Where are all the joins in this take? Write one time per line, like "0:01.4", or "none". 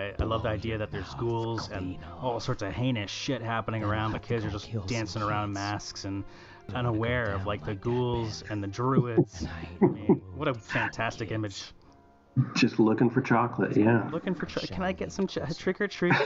0:06.7